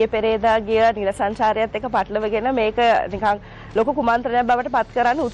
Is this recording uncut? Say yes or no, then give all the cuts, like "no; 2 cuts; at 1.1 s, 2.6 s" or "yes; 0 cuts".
yes; 0 cuts